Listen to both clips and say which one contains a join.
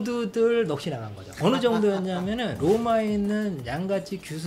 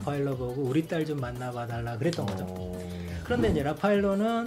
first; 1 cut; at 1.2 s

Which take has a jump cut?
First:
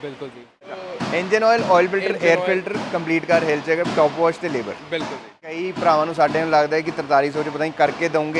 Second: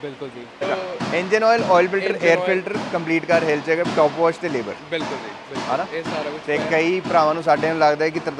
first; 1 cut; at 5.6 s

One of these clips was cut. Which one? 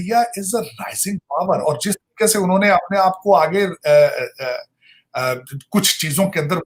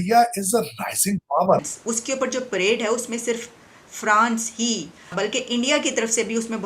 second; 2 cuts; at 1.6 s, 5.1 s

